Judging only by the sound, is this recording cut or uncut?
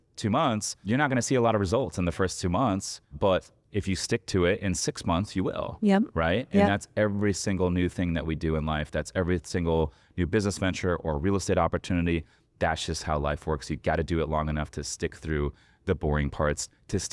cut